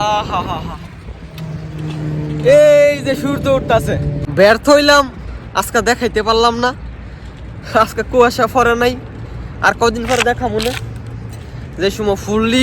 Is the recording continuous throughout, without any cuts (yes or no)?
no